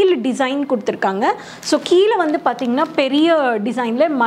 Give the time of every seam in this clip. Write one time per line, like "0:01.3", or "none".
none